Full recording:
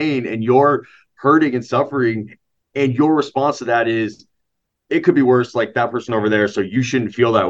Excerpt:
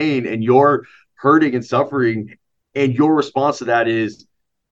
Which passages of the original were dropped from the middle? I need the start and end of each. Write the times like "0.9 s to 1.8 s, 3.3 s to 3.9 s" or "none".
none